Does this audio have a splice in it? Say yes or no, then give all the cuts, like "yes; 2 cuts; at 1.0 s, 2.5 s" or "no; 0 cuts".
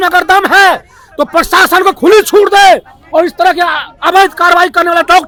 no; 0 cuts